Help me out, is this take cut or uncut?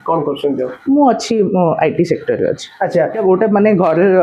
cut